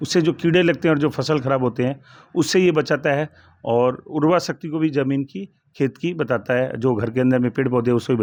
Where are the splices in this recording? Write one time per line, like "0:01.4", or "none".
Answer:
none

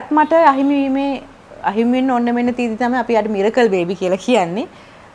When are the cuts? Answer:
none

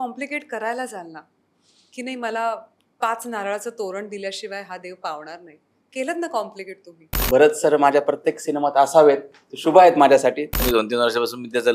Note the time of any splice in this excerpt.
0:07.1
0:10.6

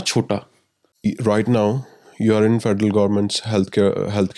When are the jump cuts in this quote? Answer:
0:00.9

